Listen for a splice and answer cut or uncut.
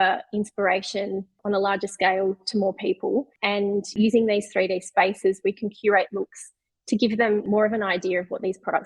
cut